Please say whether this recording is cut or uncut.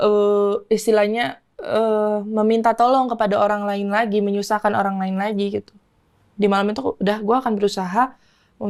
uncut